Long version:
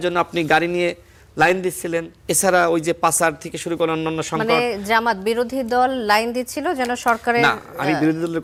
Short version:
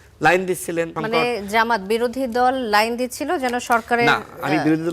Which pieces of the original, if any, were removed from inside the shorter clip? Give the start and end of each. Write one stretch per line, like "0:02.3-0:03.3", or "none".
0:02.1-0:04.3